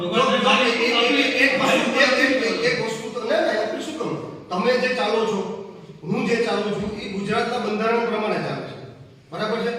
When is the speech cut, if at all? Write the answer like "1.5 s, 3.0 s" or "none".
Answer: 3.7 s